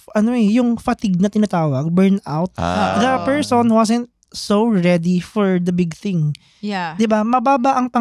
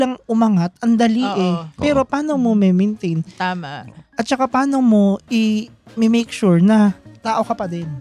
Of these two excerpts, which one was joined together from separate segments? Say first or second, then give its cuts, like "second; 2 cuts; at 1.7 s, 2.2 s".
second; 1 cut; at 7.1 s